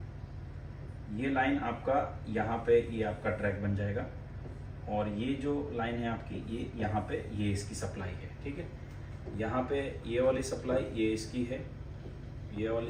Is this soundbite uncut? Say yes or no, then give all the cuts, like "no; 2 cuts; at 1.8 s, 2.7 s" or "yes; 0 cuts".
yes; 0 cuts